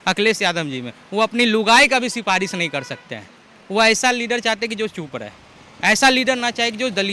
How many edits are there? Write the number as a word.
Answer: zero